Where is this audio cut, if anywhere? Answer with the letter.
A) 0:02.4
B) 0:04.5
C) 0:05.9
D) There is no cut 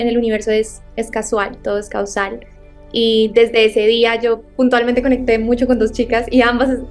D